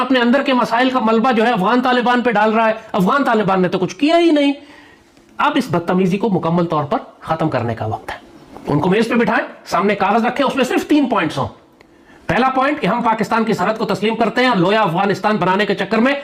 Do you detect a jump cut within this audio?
no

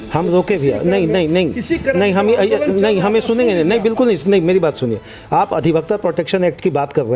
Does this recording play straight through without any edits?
yes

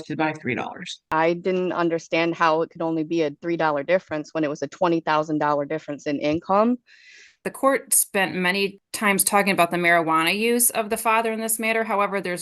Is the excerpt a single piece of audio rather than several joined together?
no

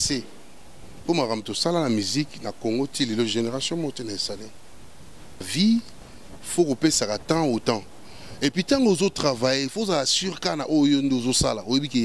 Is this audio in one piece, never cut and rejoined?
no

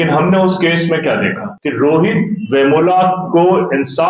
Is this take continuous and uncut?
no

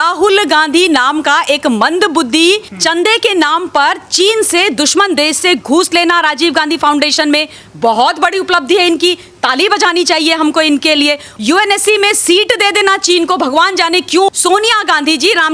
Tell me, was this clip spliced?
yes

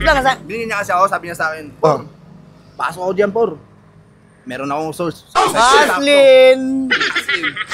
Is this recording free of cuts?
yes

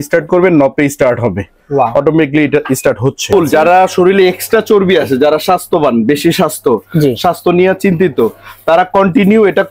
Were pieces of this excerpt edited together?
yes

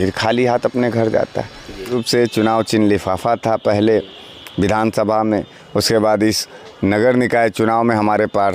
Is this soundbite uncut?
no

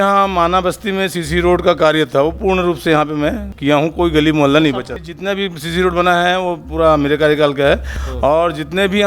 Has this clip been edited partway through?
yes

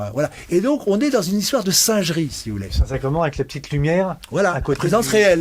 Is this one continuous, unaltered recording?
yes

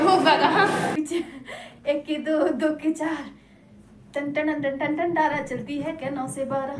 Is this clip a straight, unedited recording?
no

